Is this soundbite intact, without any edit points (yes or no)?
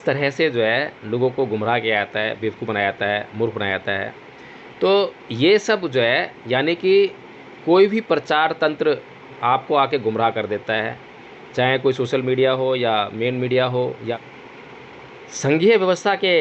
yes